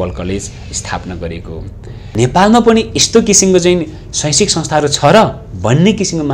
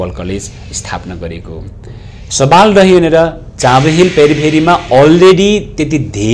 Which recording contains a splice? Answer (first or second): first